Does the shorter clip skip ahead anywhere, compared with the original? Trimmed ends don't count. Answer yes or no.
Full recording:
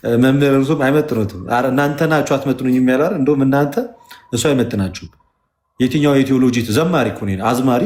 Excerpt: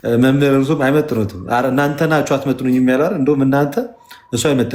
no